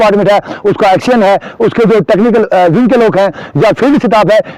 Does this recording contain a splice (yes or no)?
no